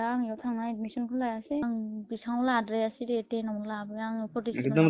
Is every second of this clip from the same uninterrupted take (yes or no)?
no